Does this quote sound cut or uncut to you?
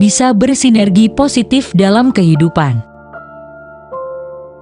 cut